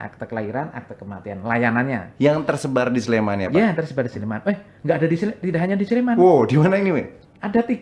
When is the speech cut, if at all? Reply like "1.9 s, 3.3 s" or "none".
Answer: none